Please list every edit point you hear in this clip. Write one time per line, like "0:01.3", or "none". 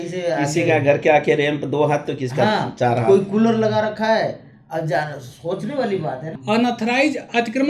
0:06.3